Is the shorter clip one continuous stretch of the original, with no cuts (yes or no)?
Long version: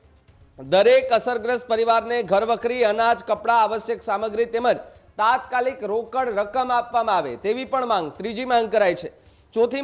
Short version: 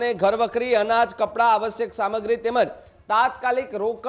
yes